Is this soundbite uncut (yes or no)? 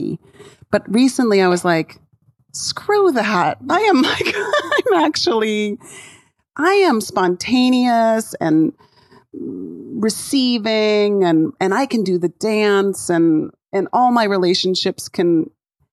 yes